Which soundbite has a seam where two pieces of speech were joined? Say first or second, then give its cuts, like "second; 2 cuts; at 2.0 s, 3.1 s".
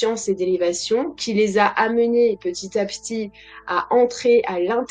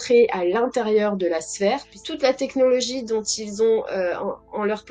second; 1 cut; at 1.9 s